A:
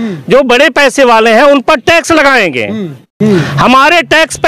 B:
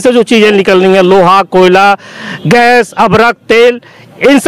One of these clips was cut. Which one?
A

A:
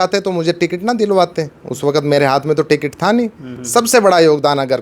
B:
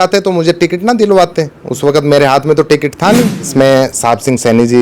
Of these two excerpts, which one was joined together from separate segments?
B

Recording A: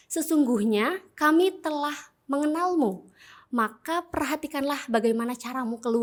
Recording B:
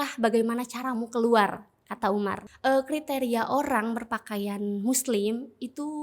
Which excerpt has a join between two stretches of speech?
B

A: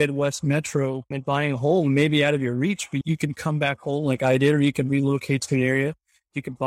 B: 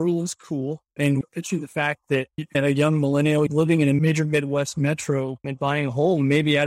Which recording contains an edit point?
B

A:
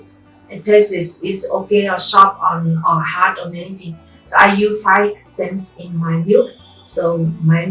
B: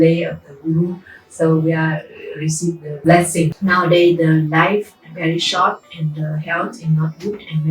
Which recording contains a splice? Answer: B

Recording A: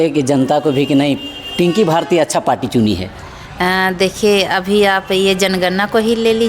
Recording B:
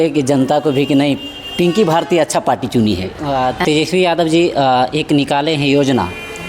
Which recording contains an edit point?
B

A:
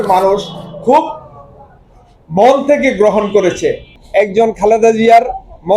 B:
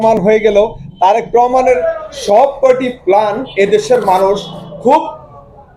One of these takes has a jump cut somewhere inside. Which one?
A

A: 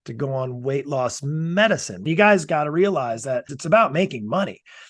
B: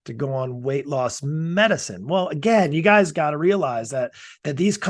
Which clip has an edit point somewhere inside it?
A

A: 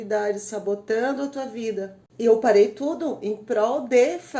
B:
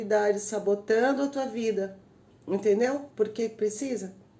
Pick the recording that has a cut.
A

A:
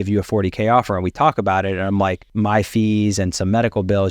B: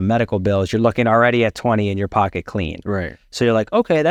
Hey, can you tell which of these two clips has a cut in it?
A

